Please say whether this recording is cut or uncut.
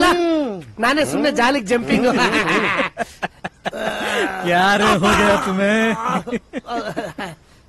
uncut